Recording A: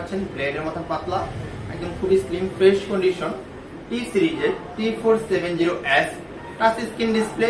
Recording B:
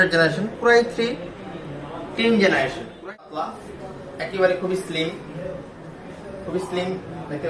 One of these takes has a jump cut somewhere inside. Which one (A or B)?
B